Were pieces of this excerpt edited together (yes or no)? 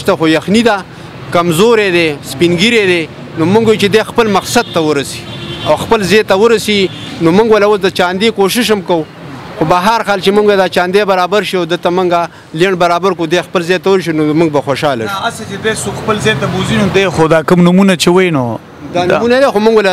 no